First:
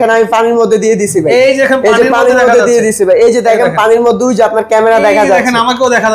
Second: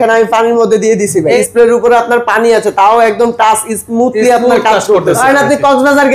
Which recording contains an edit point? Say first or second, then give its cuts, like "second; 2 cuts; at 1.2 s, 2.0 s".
second; 2 cuts; at 1.4 s, 5.2 s